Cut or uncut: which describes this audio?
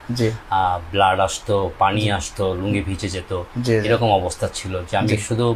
uncut